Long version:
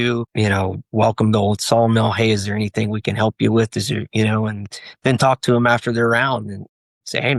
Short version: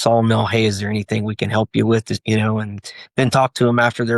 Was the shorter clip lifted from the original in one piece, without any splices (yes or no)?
no